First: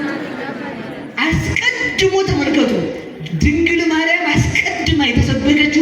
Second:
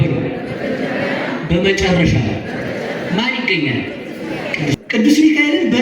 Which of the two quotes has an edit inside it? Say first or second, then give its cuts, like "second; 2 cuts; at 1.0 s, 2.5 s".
second; 1 cut; at 4.8 s